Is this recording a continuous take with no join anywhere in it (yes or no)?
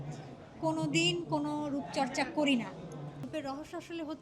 no